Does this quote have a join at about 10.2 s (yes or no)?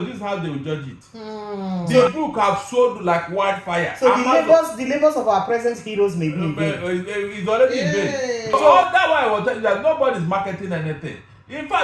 no